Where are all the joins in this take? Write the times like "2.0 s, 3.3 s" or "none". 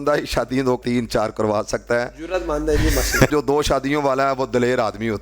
0.8 s, 3.3 s

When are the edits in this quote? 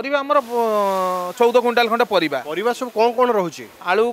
none

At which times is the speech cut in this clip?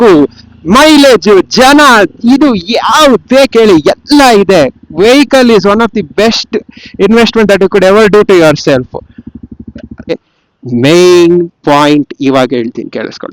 10.2 s

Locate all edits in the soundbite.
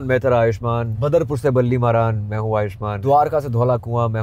0.9 s, 3.0 s

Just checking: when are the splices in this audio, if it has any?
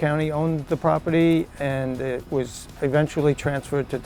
none

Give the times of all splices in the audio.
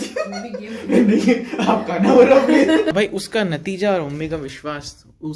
2.9 s

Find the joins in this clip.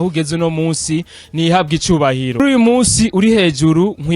2.4 s

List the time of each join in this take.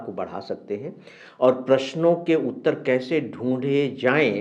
none

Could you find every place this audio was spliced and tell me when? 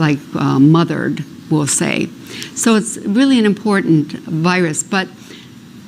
4.4 s

